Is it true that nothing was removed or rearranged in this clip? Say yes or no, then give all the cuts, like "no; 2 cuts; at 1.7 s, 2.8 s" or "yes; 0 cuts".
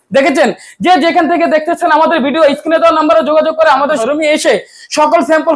no; 1 cut; at 4.0 s